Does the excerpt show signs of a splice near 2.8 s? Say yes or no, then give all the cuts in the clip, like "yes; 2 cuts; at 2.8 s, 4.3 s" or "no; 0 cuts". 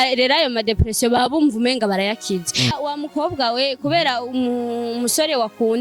yes; 1 cut; at 2.8 s